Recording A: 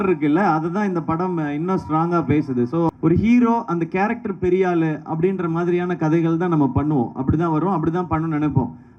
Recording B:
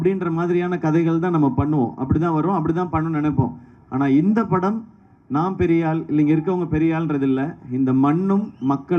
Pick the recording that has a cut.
A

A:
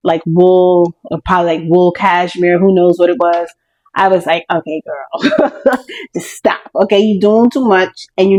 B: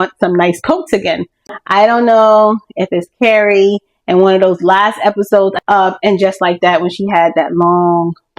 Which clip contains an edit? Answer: B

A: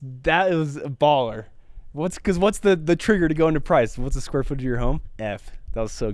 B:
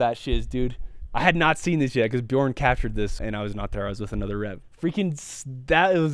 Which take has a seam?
B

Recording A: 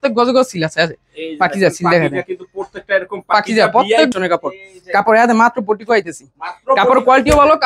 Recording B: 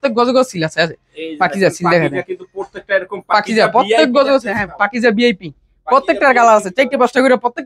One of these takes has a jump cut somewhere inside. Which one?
A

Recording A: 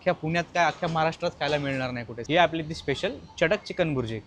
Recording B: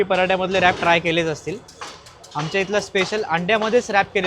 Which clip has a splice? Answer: A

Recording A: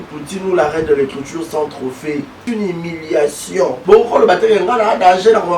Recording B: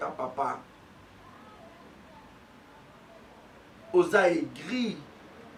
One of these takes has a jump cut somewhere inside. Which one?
A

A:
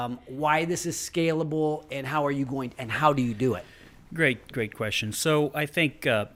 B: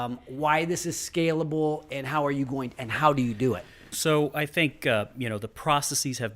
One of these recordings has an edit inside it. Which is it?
B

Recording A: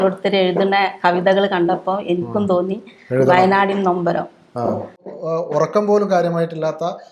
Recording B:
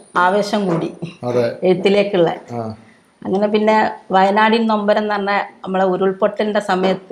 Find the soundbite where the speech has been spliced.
A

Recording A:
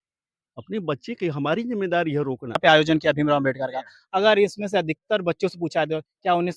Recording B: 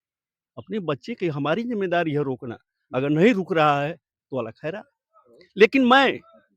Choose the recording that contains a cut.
A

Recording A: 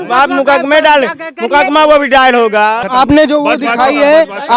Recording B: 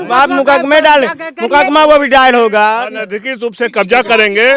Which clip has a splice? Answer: A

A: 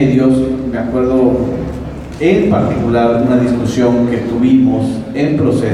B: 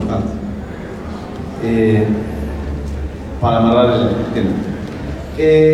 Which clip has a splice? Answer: B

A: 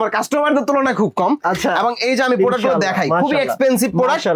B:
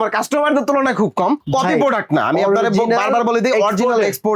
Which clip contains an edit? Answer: B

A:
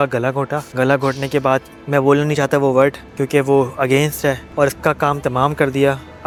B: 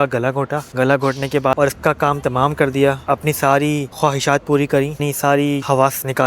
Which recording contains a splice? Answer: B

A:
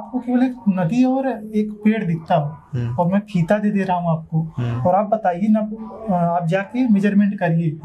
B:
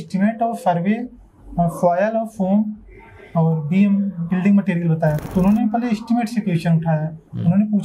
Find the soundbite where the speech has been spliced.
B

